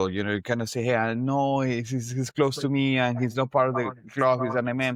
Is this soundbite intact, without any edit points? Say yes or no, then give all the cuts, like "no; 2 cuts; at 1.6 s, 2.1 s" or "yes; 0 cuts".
yes; 0 cuts